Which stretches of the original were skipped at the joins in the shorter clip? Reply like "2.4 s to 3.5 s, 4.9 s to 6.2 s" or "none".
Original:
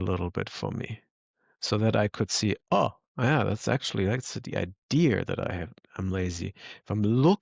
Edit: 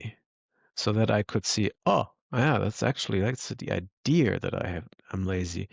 none